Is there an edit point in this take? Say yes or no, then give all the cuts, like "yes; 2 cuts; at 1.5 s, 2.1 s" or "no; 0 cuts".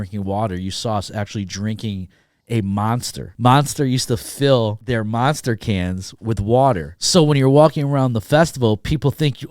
yes; 3 cuts; at 3.2 s, 4.8 s, 6.9 s